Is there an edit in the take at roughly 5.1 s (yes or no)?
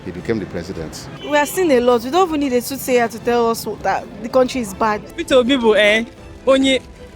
yes